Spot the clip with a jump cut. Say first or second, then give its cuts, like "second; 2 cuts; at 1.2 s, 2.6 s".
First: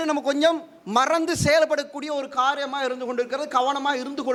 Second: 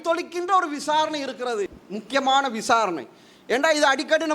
second; 1 cut; at 1.8 s